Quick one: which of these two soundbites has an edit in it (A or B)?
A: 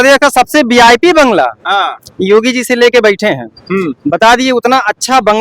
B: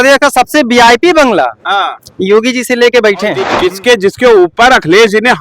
B